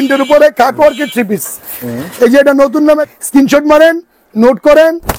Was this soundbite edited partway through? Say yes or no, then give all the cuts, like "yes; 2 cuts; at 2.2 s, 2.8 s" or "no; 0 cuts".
yes; 1 cut; at 3.1 s